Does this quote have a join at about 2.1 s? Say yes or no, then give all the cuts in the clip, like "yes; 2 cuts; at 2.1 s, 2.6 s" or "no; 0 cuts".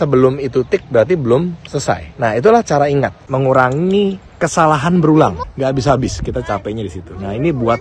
yes; 3 cuts; at 2.1 s, 3.2 s, 5.4 s